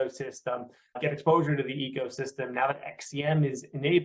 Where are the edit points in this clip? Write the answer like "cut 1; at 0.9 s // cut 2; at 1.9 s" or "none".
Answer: cut 1; at 1.0 s